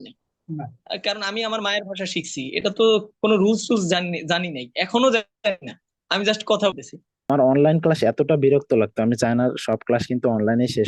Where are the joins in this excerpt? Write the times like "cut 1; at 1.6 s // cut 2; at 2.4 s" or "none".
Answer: cut 1; at 7.3 s